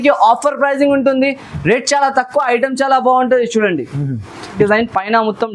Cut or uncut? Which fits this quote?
cut